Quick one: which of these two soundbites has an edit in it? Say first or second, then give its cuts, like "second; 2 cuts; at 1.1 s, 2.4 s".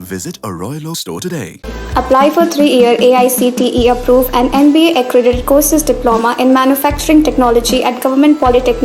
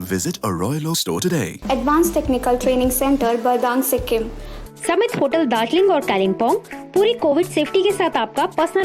second; 2 cuts; at 1.5 s, 4.5 s